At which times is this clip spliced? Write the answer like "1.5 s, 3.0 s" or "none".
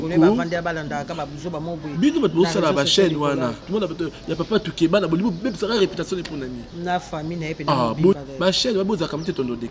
3.7 s, 8.1 s